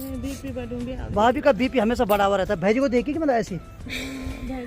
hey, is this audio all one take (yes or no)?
yes